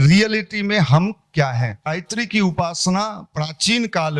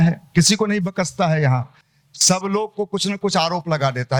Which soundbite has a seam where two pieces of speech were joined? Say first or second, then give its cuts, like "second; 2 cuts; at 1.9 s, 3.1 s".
first; 1 cut; at 2.0 s